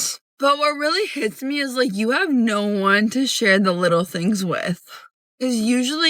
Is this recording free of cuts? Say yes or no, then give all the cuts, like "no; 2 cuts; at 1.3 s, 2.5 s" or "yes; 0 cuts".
yes; 0 cuts